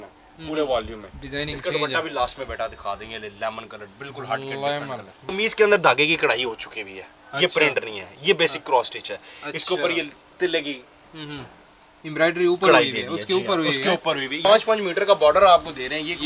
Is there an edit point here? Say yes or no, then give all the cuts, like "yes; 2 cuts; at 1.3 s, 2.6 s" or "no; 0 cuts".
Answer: yes; 2 cuts; at 5.3 s, 14.4 s